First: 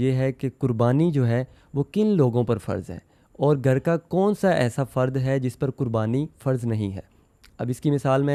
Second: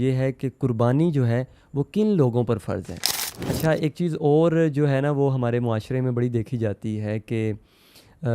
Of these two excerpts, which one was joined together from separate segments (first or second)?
second